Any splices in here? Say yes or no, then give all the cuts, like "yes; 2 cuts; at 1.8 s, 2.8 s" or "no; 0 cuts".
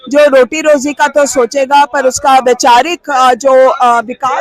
no; 0 cuts